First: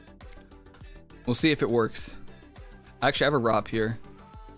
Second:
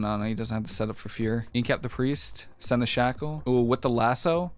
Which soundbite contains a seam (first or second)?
second